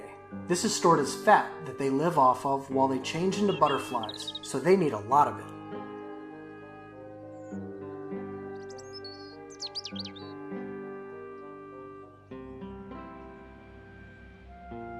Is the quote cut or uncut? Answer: cut